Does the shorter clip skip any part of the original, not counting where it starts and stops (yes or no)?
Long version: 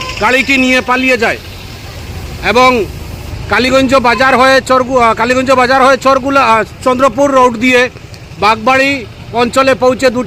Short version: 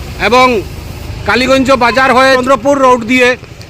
yes